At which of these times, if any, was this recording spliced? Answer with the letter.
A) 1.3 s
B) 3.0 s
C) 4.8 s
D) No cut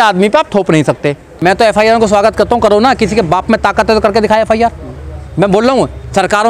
A